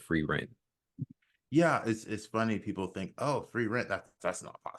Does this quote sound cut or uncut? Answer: uncut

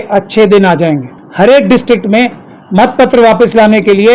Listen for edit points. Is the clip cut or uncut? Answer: cut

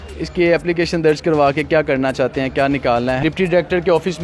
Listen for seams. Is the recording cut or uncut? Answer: cut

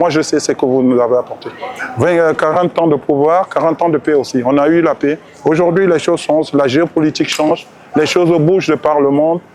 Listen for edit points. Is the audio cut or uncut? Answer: uncut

